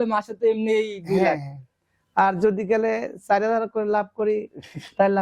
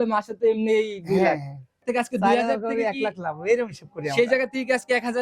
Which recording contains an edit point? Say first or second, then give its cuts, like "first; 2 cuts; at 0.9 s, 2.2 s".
second; 1 cut; at 1.8 s